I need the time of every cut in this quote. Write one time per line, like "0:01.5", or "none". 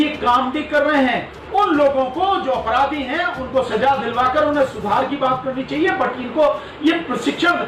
none